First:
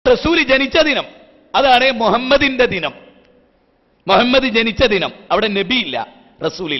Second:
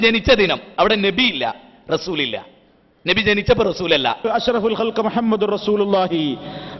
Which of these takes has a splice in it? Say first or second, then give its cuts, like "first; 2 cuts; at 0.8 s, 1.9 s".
second; 1 cut; at 4.3 s